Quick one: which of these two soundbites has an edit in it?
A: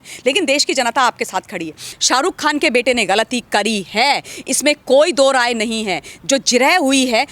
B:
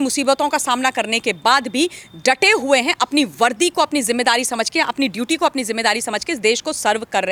A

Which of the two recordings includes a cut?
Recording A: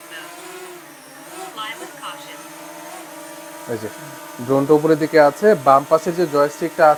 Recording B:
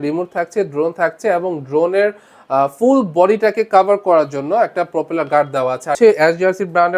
B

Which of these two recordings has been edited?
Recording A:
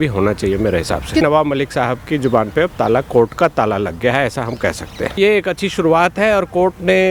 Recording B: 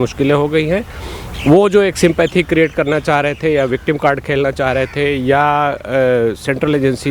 A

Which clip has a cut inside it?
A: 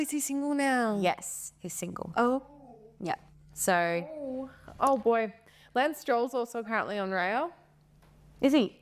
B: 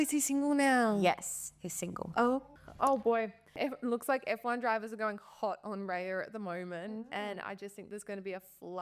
B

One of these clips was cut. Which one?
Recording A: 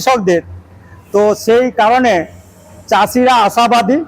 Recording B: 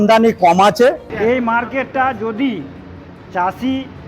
B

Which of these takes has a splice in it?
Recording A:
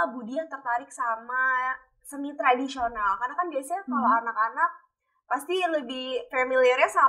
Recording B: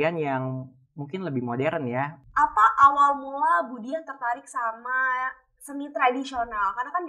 B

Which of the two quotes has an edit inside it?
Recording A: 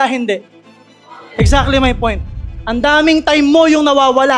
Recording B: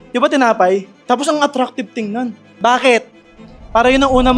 B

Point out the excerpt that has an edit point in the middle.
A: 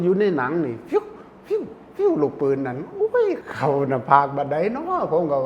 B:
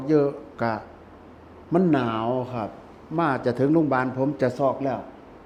A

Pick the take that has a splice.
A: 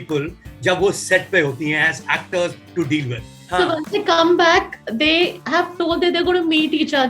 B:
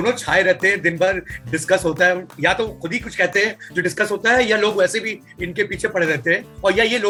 A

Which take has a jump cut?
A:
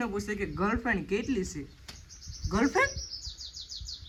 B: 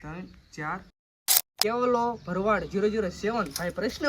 B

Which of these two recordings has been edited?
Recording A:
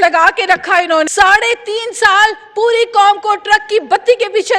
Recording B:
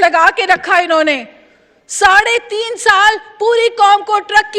A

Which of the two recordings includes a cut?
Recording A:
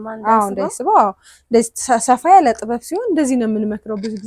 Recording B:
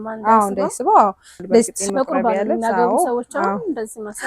B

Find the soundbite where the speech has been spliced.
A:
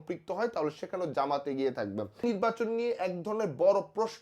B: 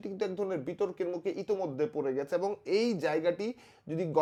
A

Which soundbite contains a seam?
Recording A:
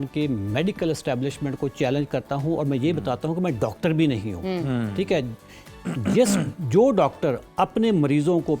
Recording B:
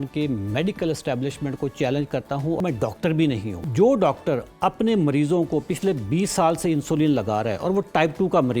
B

